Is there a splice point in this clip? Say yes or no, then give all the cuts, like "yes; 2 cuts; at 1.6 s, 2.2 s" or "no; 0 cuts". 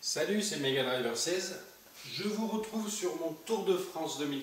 no; 0 cuts